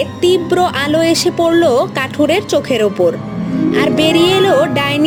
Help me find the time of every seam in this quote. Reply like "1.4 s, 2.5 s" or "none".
none